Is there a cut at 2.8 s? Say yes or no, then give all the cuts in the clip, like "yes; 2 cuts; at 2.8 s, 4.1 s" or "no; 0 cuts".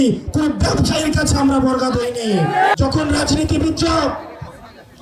yes; 1 cut; at 2.8 s